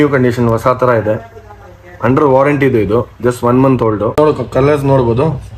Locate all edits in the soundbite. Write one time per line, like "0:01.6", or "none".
0:04.2